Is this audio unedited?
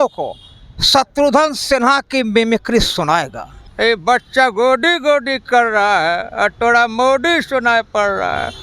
no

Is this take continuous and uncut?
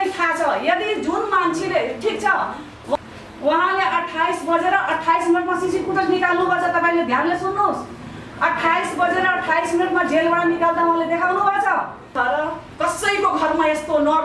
no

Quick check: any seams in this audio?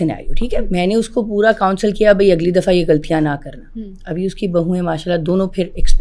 no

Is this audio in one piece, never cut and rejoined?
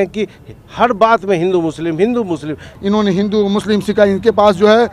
no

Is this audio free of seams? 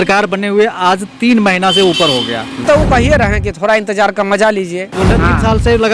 no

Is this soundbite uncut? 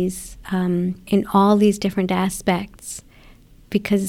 no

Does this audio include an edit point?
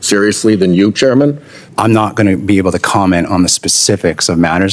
yes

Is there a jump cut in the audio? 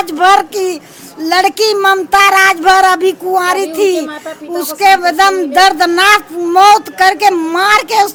no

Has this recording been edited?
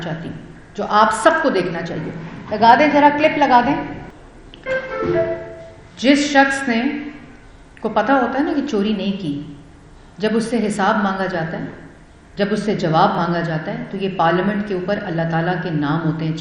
no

